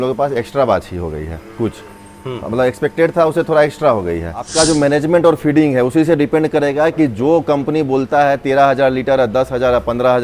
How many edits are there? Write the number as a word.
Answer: one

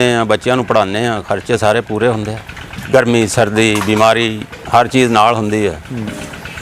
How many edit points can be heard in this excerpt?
one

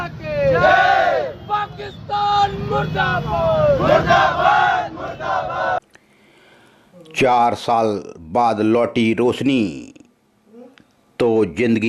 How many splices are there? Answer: one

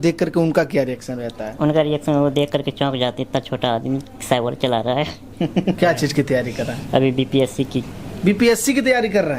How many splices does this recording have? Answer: one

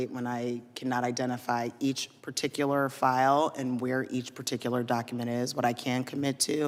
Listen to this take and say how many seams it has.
zero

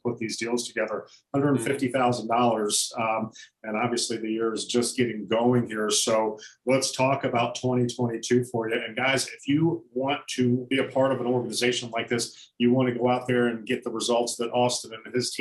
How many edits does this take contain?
one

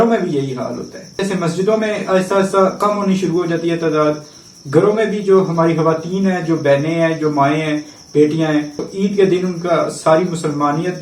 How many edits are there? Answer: two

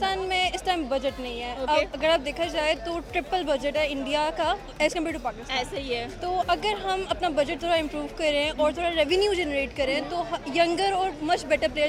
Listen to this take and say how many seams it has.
zero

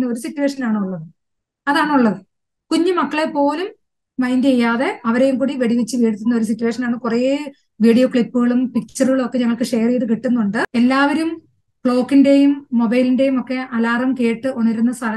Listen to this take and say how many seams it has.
one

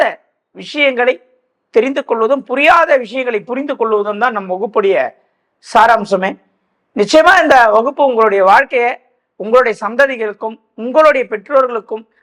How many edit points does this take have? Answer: zero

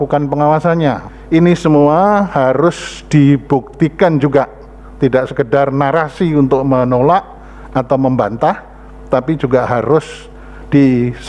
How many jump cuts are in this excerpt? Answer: one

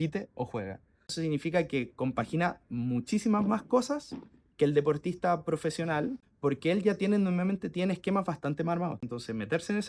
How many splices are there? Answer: three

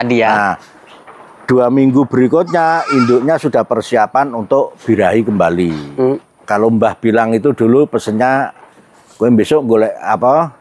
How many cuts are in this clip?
one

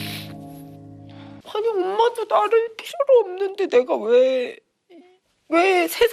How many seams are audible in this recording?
one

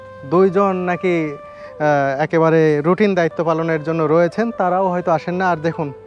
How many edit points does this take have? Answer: zero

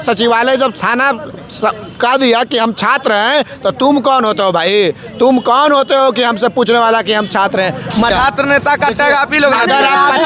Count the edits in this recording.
one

